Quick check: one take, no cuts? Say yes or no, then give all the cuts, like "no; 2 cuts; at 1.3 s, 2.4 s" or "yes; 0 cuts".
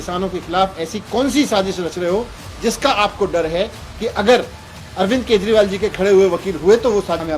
yes; 0 cuts